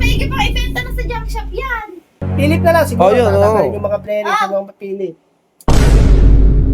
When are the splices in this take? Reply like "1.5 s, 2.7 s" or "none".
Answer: 2.2 s

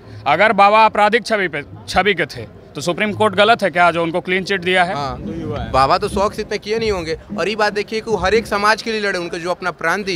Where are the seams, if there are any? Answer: 5.2 s

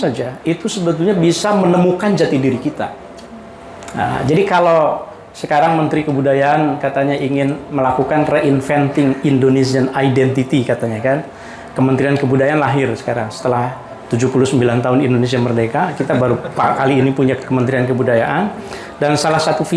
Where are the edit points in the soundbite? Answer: none

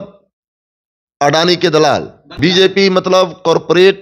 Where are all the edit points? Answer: 2.5 s

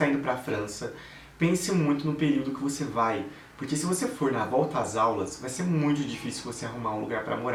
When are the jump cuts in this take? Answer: none

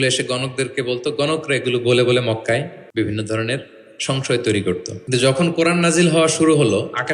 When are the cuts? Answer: 2.8 s, 4.9 s

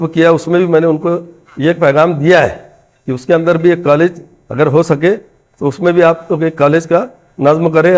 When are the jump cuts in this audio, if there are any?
none

